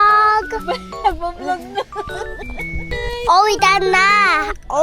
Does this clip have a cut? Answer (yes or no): yes